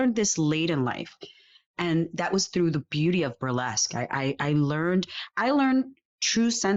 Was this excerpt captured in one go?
yes; 0 cuts

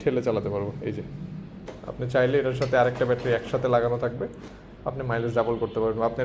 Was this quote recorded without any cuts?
no; 1 cut; at 1.7 s

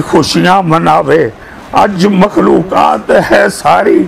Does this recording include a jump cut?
no; 0 cuts

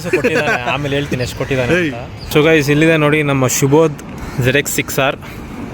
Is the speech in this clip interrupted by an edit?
yes; 1 cut; at 2.2 s

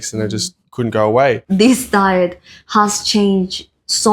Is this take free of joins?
no; 1 cut; at 1.4 s

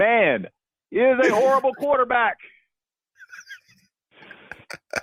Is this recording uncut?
yes; 0 cuts

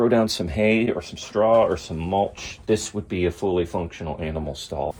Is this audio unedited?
yes; 0 cuts

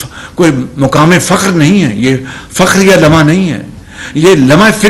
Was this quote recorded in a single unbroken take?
yes; 0 cuts

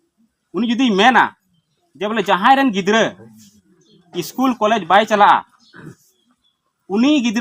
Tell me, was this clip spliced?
no; 0 cuts

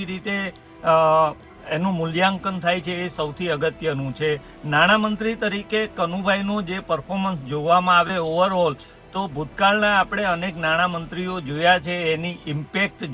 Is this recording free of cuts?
yes; 0 cuts

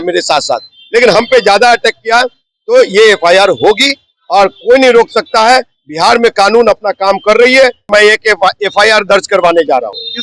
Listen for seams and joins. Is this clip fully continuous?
no; 1 cut; at 7.8 s

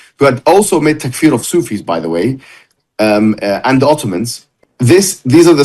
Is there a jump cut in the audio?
yes; 1 cut; at 4.6 s

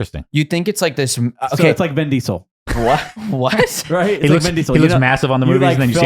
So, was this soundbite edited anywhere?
yes; 1 cut; at 2.5 s

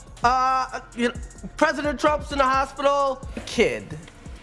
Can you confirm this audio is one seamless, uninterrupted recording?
no; 1 cut; at 3.3 s

